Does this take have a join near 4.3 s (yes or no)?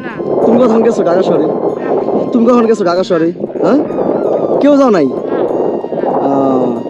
no